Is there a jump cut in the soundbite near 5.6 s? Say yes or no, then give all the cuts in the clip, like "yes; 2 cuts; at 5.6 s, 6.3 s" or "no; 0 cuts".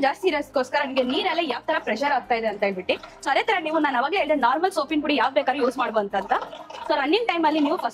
no; 0 cuts